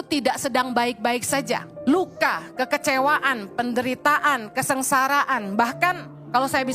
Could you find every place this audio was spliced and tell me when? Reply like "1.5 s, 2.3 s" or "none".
1.7 s